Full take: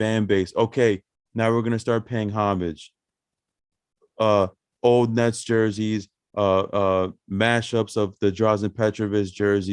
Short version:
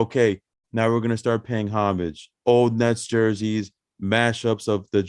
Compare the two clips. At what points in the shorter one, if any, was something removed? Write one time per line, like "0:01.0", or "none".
0:02.3
0:03.9